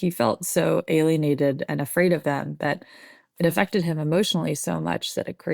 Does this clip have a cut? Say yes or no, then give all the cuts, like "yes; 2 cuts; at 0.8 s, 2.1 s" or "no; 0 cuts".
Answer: no; 0 cuts